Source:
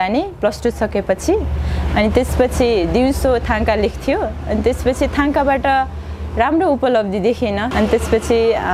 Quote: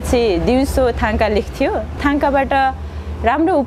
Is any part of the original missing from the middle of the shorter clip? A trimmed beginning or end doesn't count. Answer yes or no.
yes